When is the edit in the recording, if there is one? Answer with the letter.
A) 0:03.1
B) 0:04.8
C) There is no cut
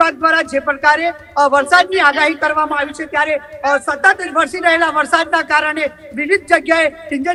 C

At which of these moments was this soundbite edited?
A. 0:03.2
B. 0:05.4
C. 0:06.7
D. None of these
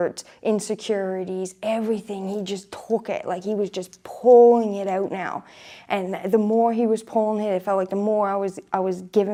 D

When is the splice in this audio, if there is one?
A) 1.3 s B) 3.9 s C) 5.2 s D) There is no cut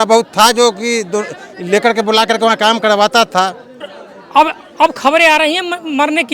B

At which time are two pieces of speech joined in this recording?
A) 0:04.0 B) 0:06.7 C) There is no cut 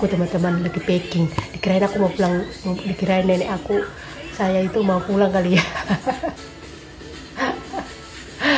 C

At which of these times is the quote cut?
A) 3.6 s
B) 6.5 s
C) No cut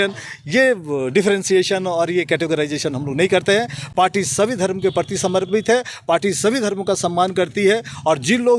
C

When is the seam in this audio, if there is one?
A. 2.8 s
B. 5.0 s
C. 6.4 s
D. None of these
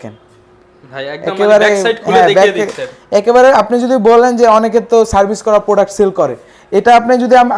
D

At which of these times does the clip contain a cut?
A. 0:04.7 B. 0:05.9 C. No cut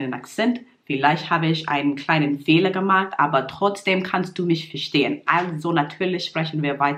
C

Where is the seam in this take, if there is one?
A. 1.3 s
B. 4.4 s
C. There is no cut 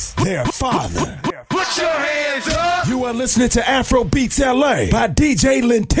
A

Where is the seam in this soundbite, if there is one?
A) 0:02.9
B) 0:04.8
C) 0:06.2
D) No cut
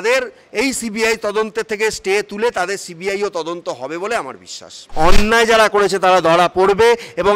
B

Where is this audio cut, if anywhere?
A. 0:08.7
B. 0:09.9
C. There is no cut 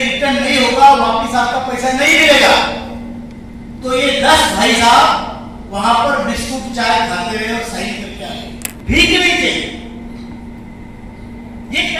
A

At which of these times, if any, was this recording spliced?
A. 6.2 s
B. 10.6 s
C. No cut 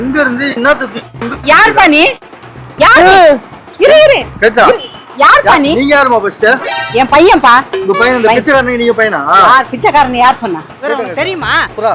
B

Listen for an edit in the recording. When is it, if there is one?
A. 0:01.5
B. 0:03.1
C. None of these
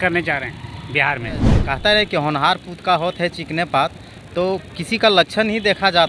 A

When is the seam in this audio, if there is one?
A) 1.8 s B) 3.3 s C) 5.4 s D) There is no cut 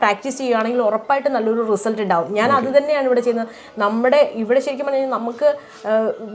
D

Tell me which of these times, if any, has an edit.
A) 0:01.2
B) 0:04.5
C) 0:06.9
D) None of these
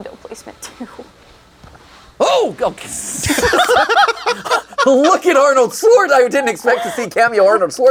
D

